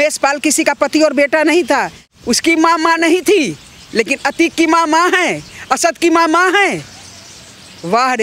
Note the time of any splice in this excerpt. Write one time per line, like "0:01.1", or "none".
0:02.0